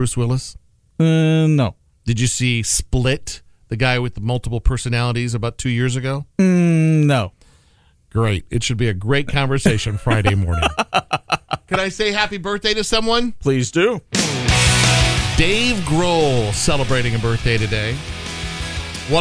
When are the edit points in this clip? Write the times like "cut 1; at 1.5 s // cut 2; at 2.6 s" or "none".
none